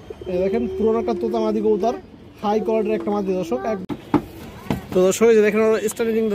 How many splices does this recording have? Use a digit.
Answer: 1